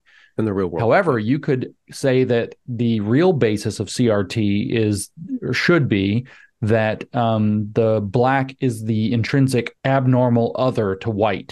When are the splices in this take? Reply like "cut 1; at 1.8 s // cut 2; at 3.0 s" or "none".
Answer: cut 1; at 9.7 s